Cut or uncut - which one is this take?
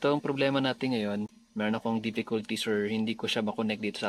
uncut